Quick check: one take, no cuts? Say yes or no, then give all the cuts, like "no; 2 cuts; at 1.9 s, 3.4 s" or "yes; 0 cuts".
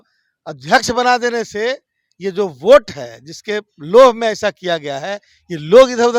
yes; 0 cuts